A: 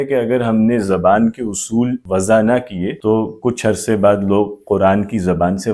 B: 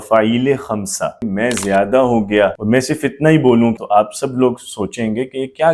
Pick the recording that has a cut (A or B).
B